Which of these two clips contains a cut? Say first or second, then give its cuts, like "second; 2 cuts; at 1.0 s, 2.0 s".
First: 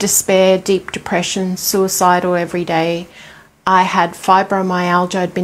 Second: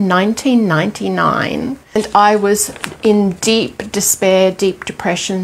second; 1 cut; at 2.0 s